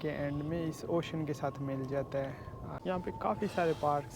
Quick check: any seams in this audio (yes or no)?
yes